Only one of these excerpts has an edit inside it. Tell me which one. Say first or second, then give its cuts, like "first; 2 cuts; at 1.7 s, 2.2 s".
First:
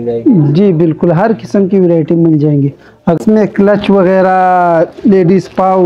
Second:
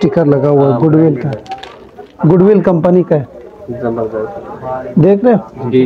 first; 1 cut; at 3.2 s